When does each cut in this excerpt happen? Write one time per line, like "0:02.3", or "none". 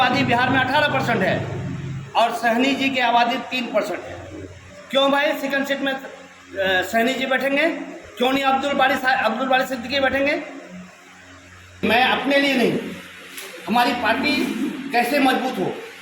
0:11.8